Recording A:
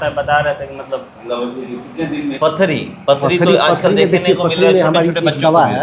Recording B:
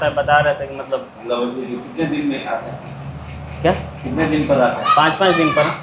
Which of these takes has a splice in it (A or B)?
A